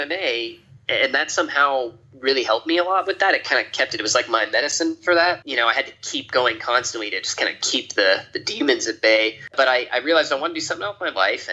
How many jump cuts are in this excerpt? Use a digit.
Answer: 2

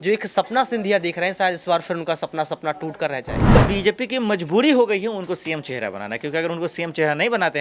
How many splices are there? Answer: 1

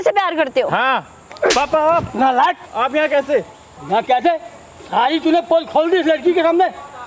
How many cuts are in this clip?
2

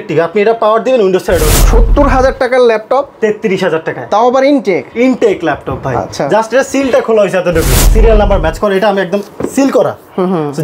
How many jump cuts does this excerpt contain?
2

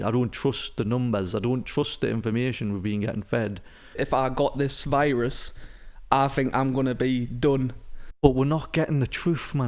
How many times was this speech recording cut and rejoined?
2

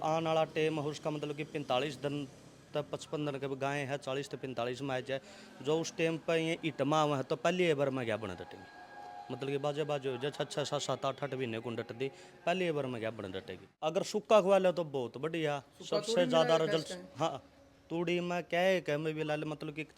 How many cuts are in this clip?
1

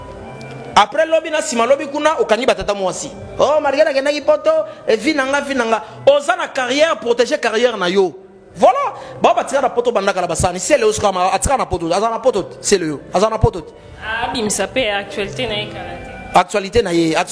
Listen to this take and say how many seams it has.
0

